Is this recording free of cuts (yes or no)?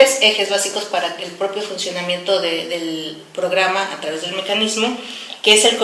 no